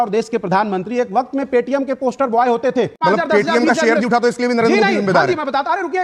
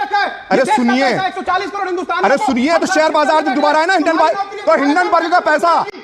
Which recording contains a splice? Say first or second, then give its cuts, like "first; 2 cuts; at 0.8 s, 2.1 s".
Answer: first; 1 cut; at 3.0 s